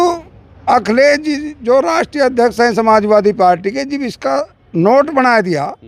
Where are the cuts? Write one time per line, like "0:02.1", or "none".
none